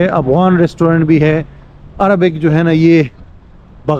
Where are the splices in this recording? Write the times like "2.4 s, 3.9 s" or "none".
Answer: none